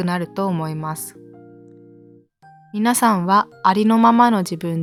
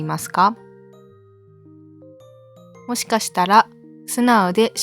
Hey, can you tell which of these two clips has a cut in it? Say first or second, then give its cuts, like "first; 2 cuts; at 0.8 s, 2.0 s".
second; 2 cuts; at 1.1 s, 2.8 s